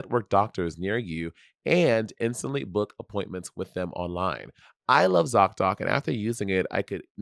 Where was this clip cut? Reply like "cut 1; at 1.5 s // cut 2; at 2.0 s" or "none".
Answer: cut 1; at 4.5 s